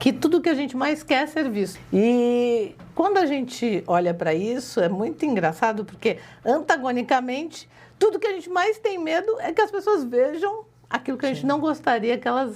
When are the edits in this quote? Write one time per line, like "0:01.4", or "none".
0:01.8